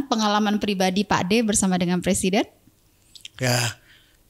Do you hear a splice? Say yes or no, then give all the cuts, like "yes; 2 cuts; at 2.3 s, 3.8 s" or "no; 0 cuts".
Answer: no; 0 cuts